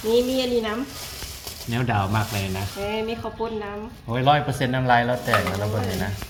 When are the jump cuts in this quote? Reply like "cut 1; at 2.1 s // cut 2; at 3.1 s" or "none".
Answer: none